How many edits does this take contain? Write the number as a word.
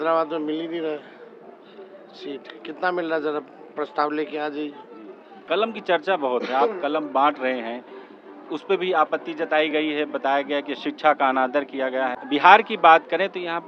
two